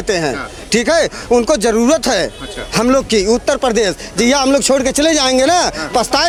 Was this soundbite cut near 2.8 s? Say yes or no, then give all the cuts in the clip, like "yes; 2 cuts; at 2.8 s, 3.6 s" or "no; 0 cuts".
no; 0 cuts